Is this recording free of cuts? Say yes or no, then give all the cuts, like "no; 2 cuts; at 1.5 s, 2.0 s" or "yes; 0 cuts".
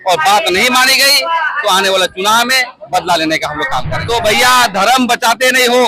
no; 1 cut; at 3.9 s